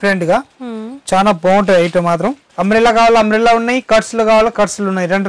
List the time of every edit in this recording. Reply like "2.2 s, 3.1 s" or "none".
2.5 s